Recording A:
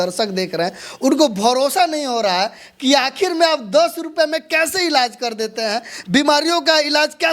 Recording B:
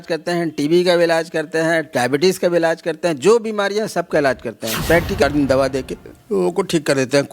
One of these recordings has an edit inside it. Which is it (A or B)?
B